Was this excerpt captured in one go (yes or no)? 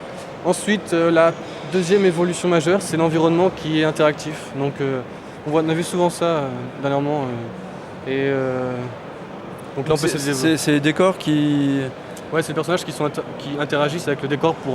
no